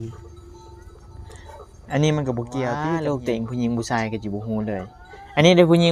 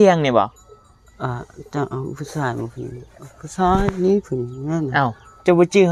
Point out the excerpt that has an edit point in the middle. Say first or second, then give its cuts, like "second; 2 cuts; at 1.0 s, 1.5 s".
first; 1 cut; at 2.8 s